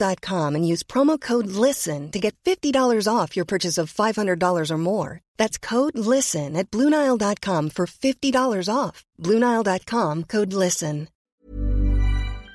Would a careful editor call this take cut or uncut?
cut